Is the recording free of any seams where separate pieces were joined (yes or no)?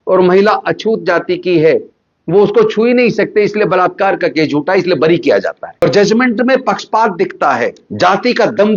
no